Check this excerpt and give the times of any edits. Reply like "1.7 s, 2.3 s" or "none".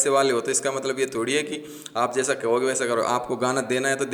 none